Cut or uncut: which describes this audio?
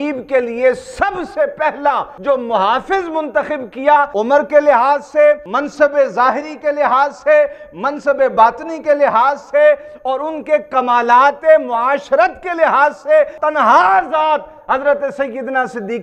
cut